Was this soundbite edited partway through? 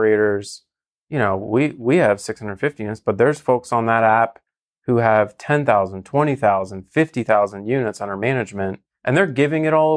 yes; 1 cut; at 8.9 s

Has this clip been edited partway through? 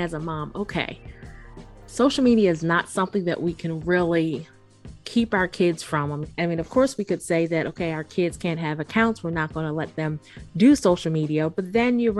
yes; 1 cut; at 6.2 s

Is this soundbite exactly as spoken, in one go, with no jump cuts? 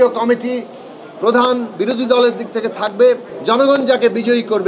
no; 1 cut; at 3.3 s

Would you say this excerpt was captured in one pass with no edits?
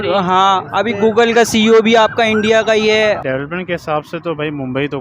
no; 1 cut; at 3.2 s

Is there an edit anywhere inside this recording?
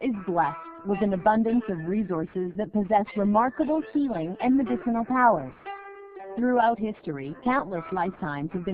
no; 0 cuts

